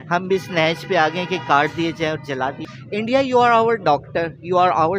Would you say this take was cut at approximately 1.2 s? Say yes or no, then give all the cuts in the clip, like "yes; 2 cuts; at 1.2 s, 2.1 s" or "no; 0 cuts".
no; 1 cut; at 2.7 s